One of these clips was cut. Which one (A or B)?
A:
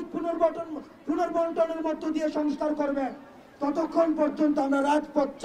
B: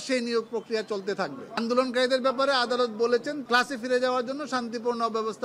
B